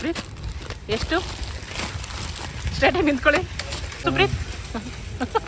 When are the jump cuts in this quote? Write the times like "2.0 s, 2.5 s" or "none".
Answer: 4.0 s